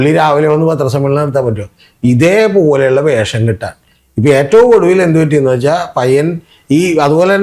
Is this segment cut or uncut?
uncut